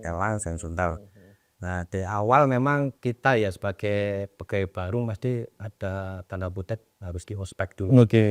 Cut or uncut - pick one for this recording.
uncut